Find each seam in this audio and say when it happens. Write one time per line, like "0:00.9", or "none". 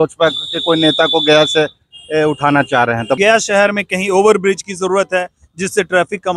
0:03.2